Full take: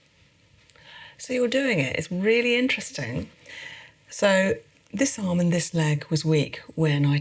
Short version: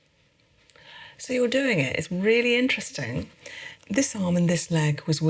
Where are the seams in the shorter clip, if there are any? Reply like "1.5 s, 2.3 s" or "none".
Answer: 3.7 s